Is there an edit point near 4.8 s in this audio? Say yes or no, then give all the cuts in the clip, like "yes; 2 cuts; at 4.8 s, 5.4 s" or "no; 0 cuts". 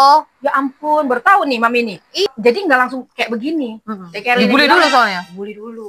no; 1 cut; at 2.3 s